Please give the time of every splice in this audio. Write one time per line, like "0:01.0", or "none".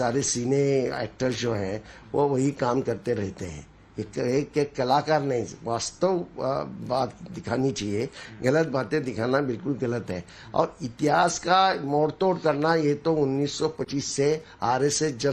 0:08.7